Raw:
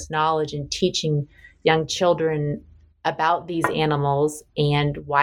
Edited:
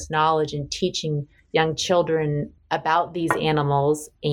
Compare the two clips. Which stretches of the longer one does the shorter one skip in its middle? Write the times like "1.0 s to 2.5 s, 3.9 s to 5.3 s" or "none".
1.3 s to 1.4 s, 2.6 s to 2.9 s